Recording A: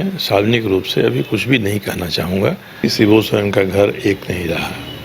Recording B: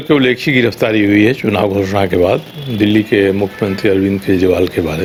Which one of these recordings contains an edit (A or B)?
A